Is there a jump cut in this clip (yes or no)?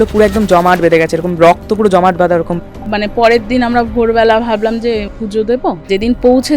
yes